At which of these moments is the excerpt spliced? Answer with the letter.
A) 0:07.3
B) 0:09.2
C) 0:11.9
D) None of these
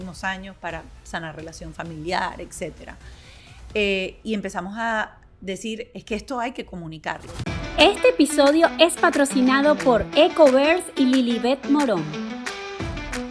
A